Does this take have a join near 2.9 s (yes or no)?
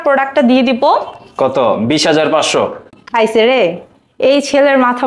no